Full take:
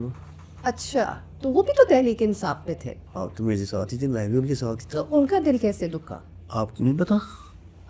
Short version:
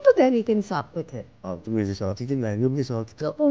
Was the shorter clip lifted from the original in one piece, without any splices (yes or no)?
yes